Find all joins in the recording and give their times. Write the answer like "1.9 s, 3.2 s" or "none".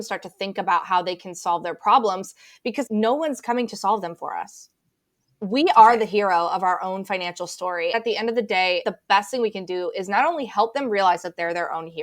2.8 s, 7.9 s, 8.8 s